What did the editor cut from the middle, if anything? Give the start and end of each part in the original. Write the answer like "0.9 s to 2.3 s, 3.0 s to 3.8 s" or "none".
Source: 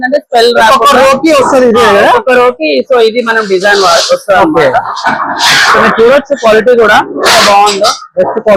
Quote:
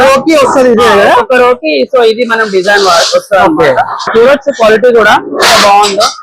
5.0 s to 5.9 s

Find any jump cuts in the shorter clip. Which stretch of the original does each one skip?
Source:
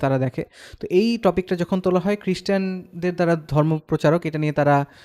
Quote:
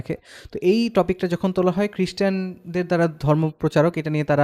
none

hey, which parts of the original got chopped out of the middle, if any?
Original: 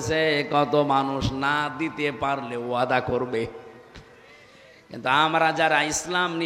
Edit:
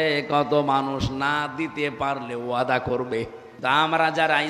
3.7 s to 4.9 s

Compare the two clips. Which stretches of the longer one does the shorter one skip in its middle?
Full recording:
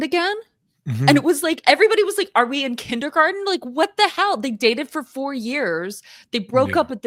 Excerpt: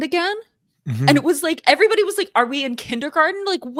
none

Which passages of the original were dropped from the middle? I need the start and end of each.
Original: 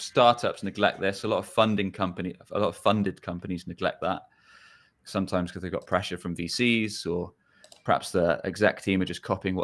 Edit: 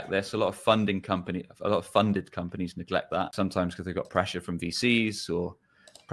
4.2 s to 5.1 s

